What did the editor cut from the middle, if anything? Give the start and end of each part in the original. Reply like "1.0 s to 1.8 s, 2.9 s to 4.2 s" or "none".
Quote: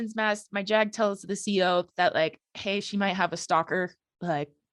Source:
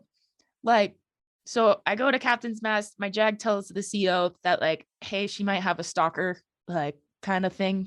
none